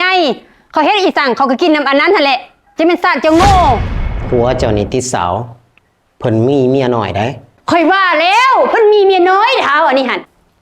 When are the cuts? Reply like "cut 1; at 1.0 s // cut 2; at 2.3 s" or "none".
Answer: cut 1; at 4.0 s